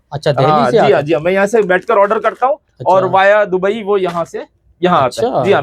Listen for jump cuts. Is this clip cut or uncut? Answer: uncut